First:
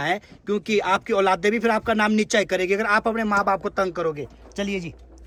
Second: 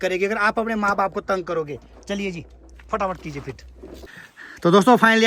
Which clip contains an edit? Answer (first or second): second